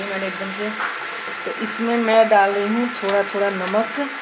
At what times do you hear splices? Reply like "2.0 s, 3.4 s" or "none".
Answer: none